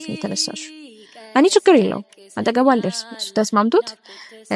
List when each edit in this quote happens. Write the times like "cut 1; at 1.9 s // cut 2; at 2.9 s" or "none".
none